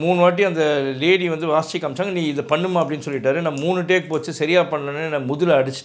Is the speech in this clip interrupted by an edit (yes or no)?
no